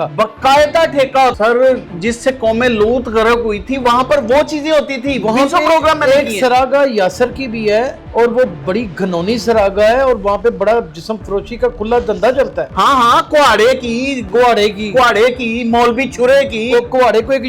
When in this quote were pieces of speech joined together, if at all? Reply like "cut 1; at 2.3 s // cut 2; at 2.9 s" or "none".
cut 1; at 1.3 s